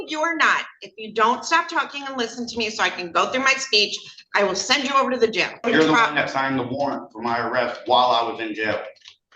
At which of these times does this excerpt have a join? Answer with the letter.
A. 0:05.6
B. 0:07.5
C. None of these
A